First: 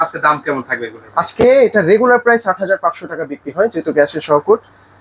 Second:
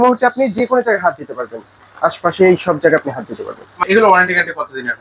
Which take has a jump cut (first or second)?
second